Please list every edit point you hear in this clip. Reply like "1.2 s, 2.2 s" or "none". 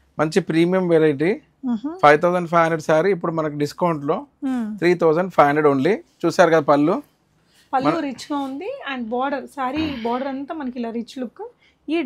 none